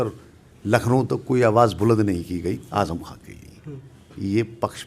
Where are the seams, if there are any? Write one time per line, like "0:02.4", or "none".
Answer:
none